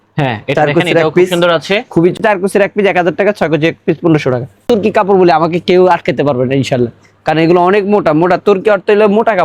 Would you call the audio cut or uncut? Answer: cut